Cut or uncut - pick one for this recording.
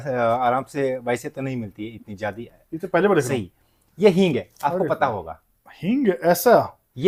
uncut